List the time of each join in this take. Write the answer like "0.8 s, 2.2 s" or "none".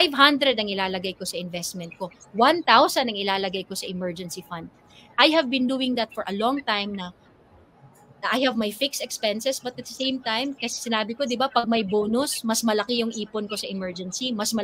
none